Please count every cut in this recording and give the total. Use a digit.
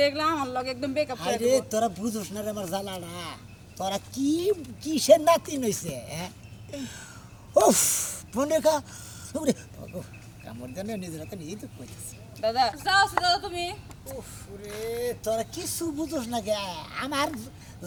0